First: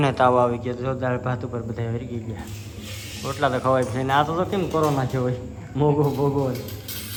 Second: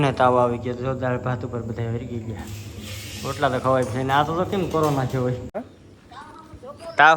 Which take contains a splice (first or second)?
second